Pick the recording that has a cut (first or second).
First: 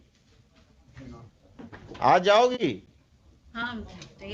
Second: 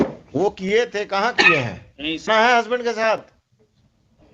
second